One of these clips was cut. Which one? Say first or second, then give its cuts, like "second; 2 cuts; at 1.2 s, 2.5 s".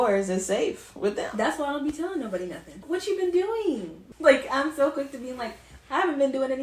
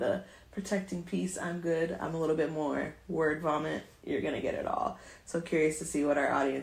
first; 2 cuts; at 2.8 s, 4.0 s